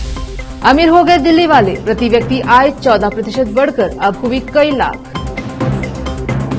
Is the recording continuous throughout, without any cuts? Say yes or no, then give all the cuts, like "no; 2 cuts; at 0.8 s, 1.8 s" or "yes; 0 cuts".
yes; 0 cuts